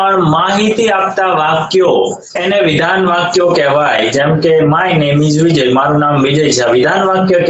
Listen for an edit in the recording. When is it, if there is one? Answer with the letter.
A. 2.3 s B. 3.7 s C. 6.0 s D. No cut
A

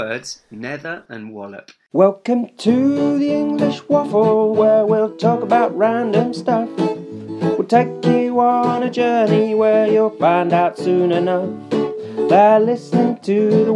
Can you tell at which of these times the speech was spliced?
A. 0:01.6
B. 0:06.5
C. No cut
A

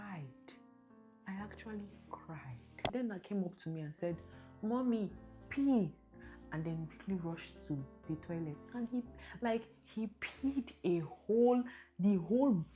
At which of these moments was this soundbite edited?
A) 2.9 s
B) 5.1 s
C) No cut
A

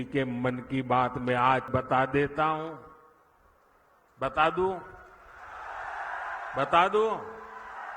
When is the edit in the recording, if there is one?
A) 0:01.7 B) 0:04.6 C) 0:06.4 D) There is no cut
A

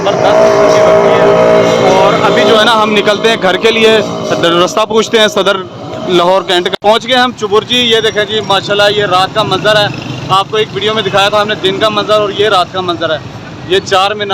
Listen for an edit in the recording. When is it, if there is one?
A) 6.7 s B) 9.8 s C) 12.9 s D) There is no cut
A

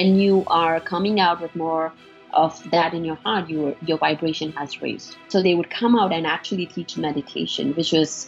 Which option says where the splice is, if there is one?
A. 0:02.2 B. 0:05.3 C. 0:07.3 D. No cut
B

